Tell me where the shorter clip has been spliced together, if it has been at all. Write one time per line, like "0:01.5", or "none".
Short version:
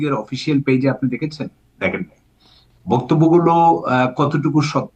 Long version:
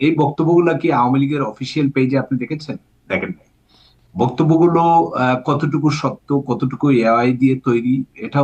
none